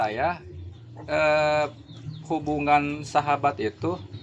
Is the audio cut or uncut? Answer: uncut